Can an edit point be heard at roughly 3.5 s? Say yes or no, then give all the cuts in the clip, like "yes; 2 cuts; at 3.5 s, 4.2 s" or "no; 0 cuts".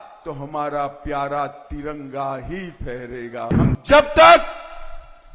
yes; 1 cut; at 3.5 s